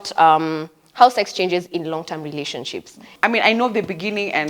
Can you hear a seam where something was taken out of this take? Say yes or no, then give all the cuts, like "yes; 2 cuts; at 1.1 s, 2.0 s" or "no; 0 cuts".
yes; 1 cut; at 3.0 s